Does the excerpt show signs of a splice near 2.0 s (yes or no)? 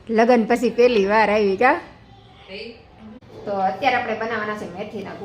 no